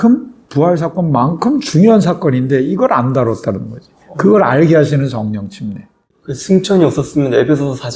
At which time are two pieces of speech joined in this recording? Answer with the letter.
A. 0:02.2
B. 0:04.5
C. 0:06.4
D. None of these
C